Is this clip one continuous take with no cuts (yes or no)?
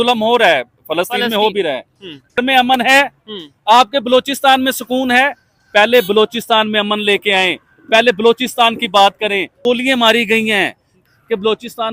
no